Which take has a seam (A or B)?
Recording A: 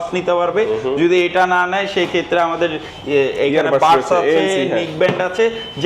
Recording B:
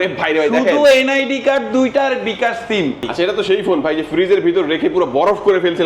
B